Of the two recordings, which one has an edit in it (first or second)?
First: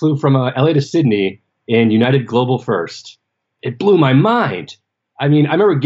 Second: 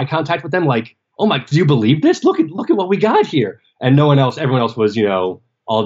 first